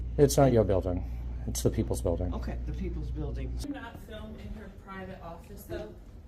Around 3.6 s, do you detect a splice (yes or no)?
yes